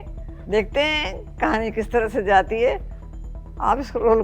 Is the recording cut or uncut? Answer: uncut